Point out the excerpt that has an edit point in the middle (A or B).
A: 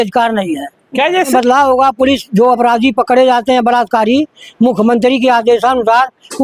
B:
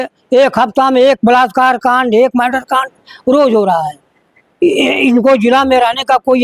A